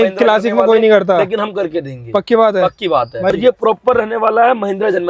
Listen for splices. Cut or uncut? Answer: cut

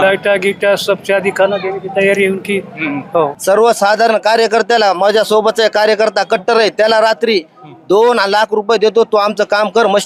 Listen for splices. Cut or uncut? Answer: cut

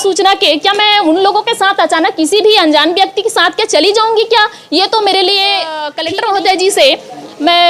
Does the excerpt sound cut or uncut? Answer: cut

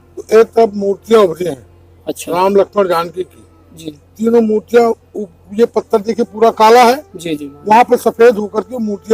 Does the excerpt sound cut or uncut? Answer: uncut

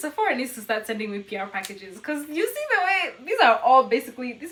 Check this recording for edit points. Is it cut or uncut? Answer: uncut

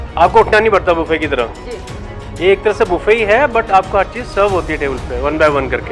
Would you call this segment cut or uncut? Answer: uncut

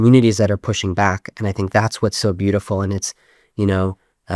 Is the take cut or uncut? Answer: uncut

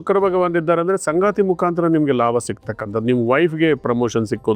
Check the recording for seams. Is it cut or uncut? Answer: uncut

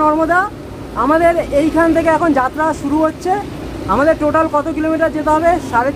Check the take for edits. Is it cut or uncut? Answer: uncut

